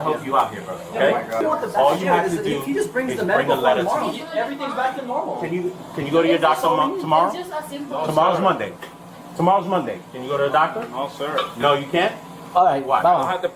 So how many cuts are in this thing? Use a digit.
1